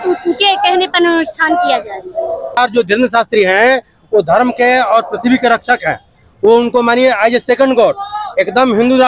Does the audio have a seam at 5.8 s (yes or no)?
no